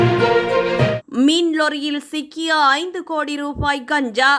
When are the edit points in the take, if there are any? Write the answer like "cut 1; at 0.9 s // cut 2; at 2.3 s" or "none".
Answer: cut 1; at 1.0 s